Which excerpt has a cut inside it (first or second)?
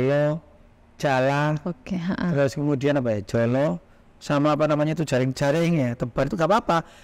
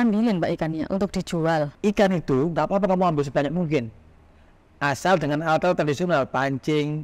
second